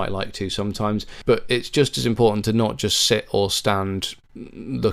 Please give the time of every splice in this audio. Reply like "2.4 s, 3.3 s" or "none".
1.1 s